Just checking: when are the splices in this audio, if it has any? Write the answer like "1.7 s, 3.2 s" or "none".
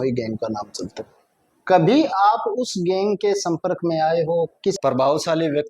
4.8 s